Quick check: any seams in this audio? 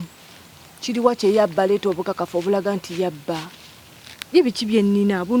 no; 0 cuts

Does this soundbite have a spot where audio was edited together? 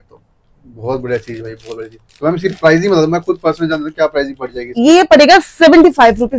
no; 0 cuts

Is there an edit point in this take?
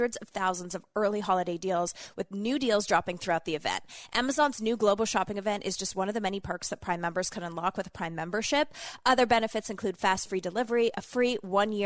no; 0 cuts

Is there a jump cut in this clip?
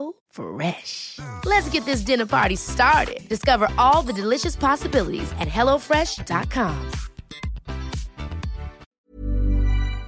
yes; 1 cut; at 8.9 s

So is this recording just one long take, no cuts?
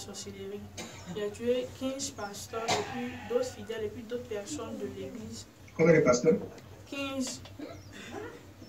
yes; 0 cuts

